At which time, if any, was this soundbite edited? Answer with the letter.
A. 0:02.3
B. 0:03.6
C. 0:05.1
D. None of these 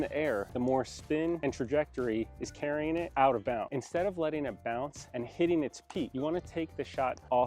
B